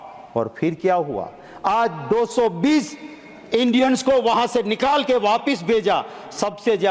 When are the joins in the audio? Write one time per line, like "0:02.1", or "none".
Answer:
none